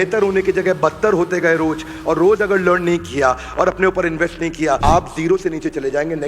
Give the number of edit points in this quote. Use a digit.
1